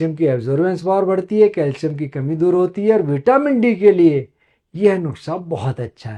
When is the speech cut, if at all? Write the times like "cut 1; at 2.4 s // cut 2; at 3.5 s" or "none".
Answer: none